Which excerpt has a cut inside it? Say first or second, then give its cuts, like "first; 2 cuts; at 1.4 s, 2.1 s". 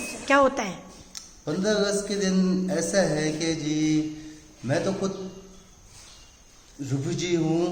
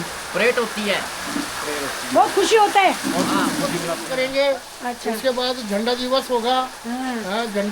second; 1 cut; at 4.0 s